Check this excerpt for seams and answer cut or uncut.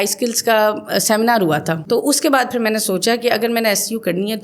cut